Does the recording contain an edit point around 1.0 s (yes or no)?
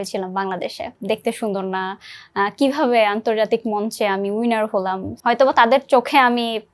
yes